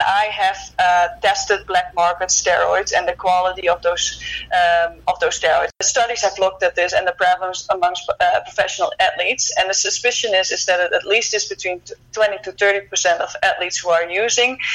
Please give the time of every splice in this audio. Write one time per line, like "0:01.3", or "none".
0:05.8

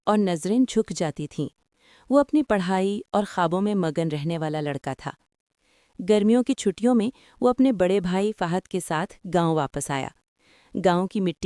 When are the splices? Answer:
none

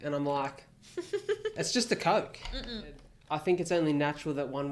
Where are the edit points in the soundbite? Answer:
0:03.1

